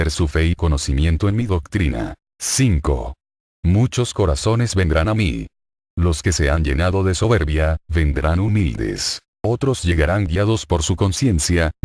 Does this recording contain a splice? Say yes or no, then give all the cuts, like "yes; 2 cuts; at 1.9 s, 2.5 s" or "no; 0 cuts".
yes; 1 cut; at 1.9 s